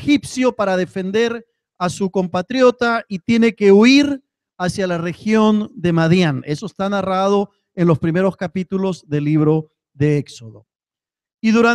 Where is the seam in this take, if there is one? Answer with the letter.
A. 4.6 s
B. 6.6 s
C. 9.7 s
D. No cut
D